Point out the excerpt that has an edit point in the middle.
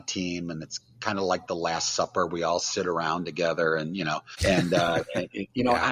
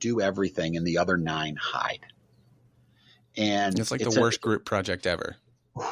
first; 1 cut; at 4.3 s

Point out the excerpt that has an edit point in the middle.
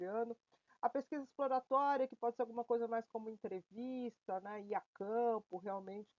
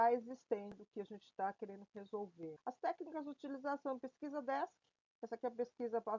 second; 2 cuts; at 0.8 s, 2.6 s

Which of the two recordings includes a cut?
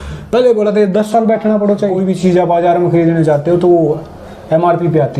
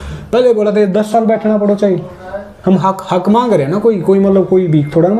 first; 1 cut; at 2.0 s

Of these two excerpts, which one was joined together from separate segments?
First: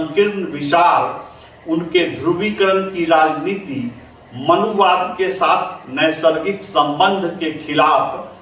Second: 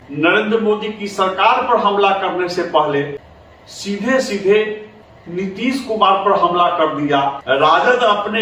second; 1 cut; at 7.4 s

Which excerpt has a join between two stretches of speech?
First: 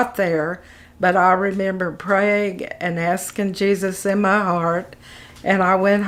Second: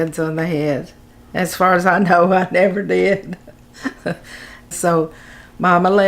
second; 1 cut; at 4.7 s

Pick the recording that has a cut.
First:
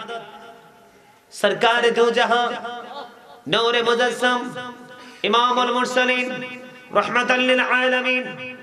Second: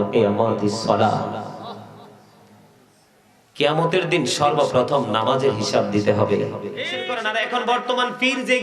second; 1 cut; at 7.1 s

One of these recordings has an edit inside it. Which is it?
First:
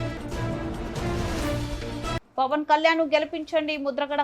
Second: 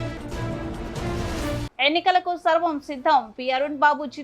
second; 1 cut; at 1.6 s

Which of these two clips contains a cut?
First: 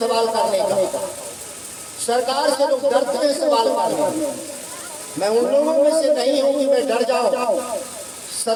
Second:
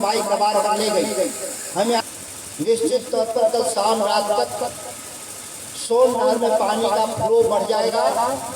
second; 1 cut; at 2.0 s

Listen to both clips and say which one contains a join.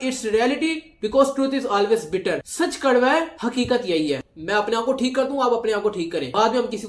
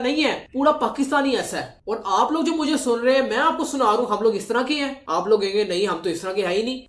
first; 1 cut; at 4.3 s

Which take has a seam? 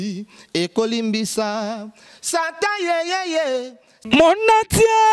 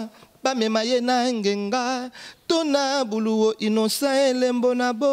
first; 1 cut; at 4.0 s

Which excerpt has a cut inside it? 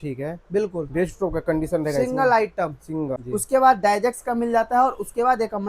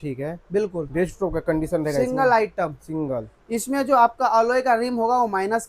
first; 1 cut; at 3.2 s

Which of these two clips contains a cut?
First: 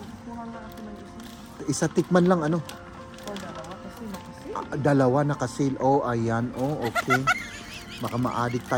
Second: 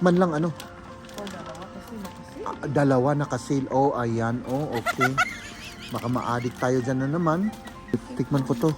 second; 1 cut; at 7.7 s

